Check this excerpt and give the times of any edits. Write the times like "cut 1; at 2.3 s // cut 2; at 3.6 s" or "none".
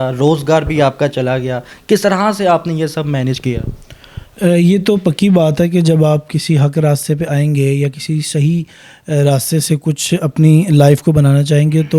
none